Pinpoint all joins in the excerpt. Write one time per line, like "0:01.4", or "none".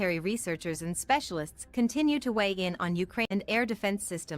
0:03.2